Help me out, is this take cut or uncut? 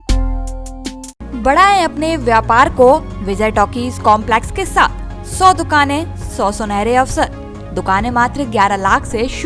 uncut